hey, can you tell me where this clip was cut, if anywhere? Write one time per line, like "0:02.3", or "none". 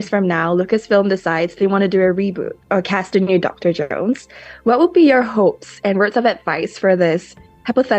none